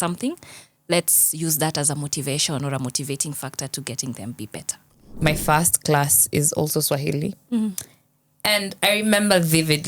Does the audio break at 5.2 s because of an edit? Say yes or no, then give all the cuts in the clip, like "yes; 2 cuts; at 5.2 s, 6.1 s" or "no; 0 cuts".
yes; 1 cut; at 5.2 s